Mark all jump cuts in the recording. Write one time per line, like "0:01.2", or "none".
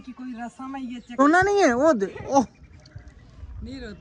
0:01.2